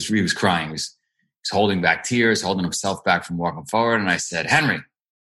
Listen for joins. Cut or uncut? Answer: uncut